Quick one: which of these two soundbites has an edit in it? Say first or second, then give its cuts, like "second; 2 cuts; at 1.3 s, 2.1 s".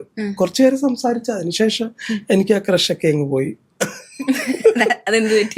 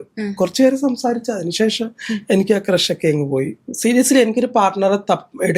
second; 1 cut; at 3.6 s